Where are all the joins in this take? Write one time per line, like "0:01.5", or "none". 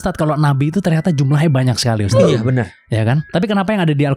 0:03.2